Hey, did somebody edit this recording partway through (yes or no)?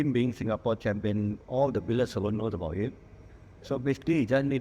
no